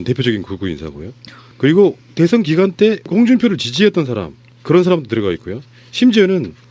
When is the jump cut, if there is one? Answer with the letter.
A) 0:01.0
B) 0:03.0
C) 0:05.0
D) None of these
C